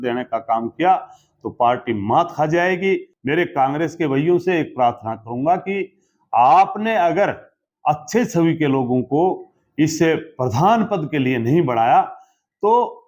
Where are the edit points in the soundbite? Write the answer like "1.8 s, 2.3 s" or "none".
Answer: 3.1 s